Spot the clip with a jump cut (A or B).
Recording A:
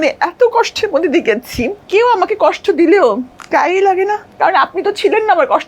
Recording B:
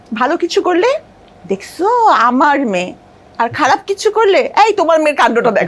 A